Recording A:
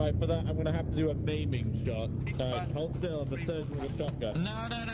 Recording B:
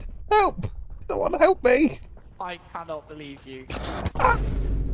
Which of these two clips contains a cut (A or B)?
B